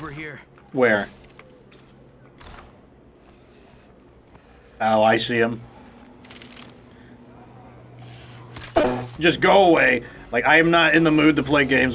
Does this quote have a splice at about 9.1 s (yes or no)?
yes